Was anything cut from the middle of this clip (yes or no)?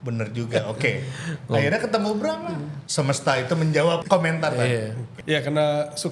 yes